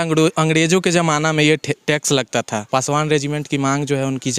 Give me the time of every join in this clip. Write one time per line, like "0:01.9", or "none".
0:02.6

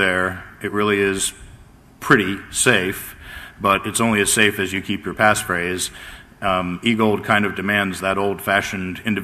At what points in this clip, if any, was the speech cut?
0:01.5

